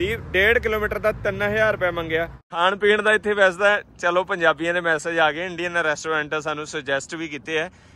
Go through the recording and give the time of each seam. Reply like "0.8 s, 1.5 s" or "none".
2.6 s